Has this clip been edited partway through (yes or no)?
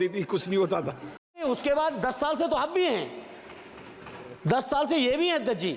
yes